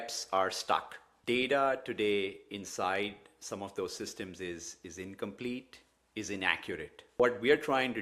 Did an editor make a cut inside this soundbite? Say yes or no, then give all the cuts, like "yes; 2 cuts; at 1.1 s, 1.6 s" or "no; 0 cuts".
yes; 1 cut; at 1.2 s